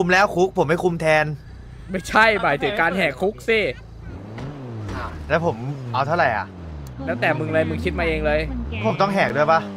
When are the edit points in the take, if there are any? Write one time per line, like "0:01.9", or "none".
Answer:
none